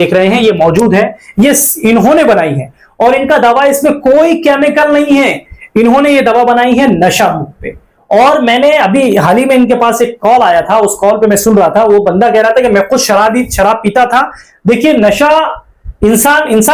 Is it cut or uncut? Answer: uncut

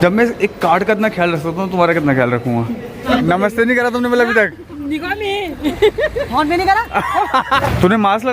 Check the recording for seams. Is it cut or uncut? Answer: cut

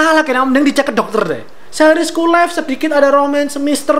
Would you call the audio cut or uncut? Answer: cut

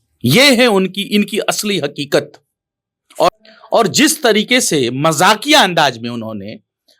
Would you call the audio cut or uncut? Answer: cut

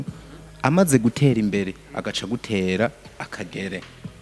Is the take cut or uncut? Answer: uncut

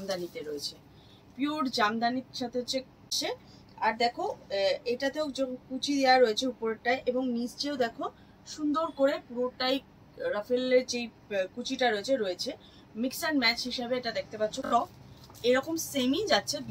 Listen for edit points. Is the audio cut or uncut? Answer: cut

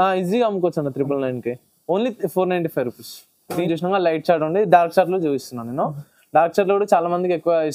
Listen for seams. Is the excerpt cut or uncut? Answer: cut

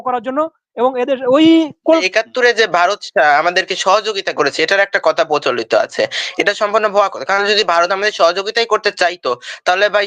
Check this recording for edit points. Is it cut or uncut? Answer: cut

